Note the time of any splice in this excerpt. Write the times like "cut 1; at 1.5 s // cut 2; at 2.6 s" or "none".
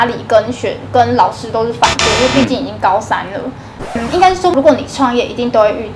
cut 1; at 3.6 s